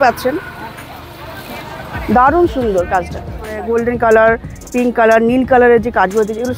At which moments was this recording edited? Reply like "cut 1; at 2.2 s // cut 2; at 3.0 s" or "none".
cut 1; at 3.6 s